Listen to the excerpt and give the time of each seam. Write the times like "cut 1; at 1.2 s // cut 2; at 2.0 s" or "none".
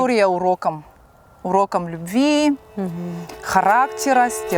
none